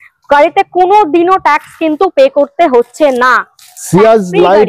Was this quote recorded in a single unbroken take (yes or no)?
yes